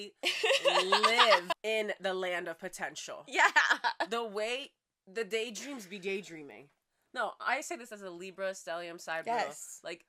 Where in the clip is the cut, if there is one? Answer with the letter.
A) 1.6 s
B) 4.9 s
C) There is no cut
A